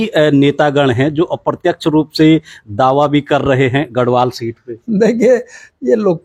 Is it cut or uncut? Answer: uncut